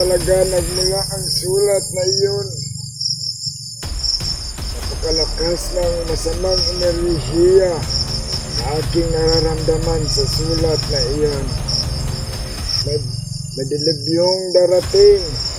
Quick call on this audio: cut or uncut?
uncut